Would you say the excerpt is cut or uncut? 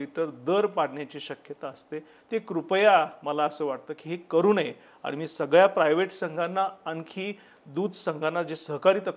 uncut